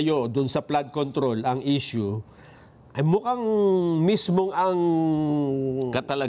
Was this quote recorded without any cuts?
yes; 0 cuts

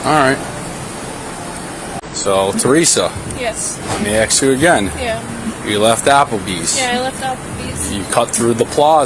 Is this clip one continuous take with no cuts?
no; 1 cut; at 2.0 s

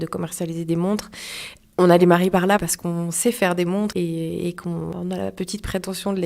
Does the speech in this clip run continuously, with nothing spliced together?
no; 3 cuts; at 2.6 s, 3.9 s, 4.9 s

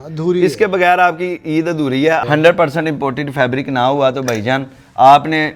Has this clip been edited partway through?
yes; 1 cut; at 2.2 s

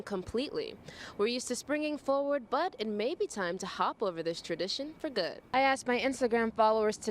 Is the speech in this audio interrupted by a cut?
yes; 1 cut; at 5.4 s

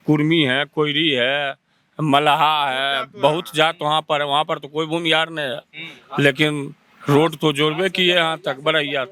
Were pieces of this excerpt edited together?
no; 0 cuts

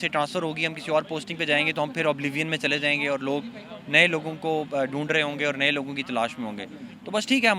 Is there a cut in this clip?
no; 0 cuts

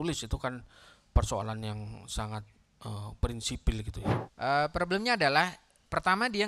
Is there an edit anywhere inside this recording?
yes; 1 cut; at 4.0 s

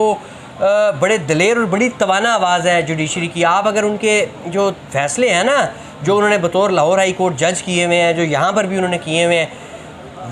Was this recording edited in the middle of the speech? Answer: no; 0 cuts

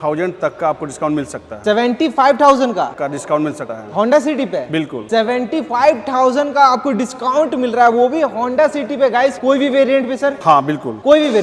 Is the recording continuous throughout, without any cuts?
yes; 0 cuts

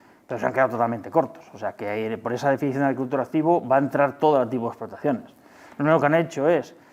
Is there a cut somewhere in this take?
no; 0 cuts

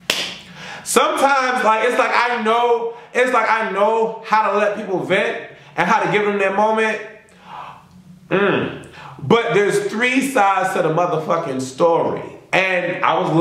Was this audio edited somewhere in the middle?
no; 0 cuts

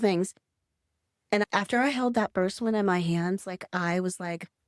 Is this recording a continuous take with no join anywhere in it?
yes; 0 cuts

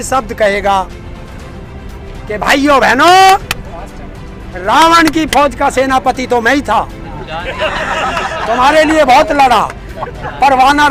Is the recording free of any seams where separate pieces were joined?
yes; 0 cuts

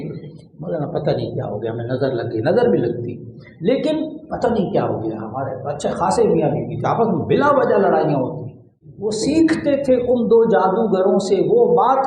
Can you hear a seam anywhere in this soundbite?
yes; 1 cut; at 8.8 s

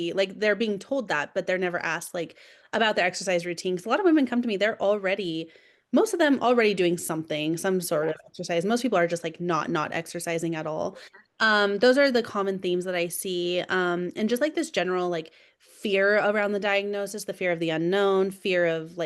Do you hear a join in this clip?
no; 0 cuts

